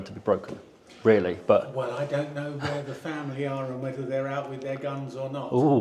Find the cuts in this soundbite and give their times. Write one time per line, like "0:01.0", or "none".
none